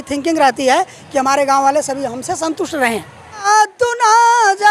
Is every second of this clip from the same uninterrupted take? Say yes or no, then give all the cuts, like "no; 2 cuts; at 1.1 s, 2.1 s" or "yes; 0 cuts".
no; 1 cut; at 3.4 s